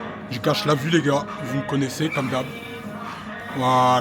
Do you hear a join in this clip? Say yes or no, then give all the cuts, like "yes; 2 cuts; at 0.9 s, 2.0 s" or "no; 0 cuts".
no; 0 cuts